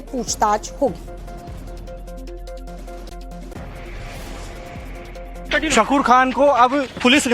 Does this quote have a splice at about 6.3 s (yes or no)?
yes